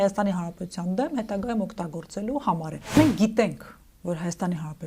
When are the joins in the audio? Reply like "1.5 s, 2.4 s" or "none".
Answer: 3.0 s

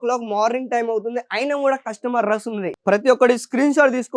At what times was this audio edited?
2.7 s

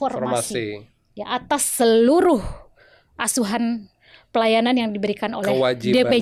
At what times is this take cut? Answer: none

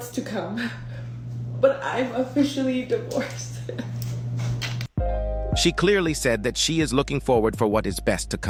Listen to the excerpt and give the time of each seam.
none

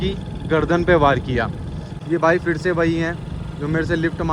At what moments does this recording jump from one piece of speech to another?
1.9 s

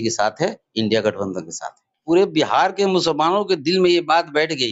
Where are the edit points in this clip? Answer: 1.9 s

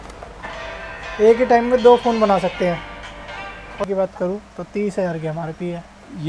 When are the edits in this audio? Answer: 3.8 s

